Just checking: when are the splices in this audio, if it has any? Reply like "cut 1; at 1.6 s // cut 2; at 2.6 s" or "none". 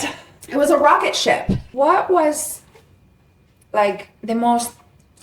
cut 1; at 1.6 s